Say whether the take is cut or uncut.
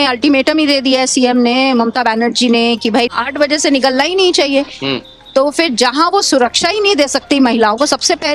uncut